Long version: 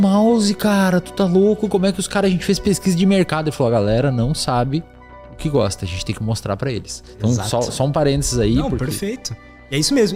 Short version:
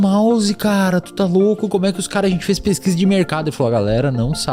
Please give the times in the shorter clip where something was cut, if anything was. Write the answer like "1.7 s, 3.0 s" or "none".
none